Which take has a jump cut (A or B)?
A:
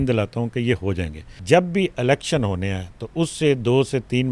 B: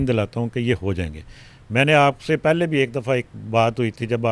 A